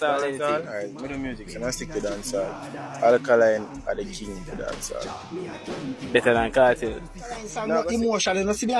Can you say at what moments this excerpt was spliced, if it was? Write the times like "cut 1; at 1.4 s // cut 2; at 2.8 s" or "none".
cut 1; at 7.5 s